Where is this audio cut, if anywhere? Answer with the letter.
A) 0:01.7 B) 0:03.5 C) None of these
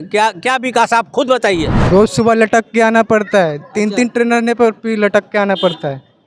A